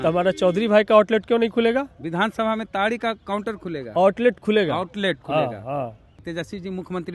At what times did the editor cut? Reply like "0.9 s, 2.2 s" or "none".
6.2 s